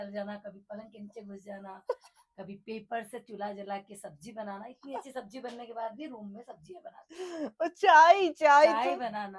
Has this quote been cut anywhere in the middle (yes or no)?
no